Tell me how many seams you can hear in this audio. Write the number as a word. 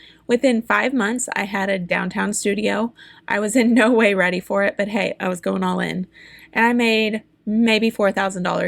zero